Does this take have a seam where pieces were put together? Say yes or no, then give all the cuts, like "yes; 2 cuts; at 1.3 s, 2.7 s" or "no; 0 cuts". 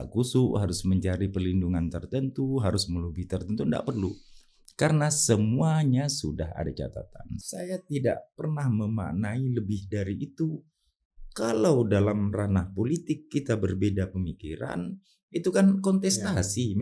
yes; 1 cut; at 7.4 s